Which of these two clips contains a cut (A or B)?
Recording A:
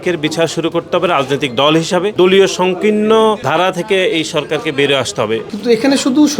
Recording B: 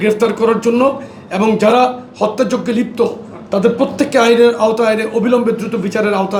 A